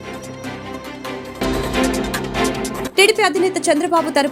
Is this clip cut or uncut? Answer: cut